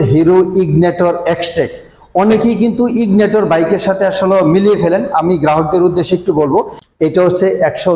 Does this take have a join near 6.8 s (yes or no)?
yes